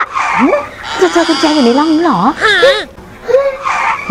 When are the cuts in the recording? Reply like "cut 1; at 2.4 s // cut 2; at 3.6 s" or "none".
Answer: cut 1; at 1.0 s